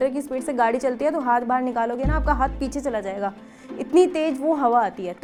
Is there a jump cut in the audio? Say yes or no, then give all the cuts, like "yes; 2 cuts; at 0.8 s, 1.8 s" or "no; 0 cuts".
no; 0 cuts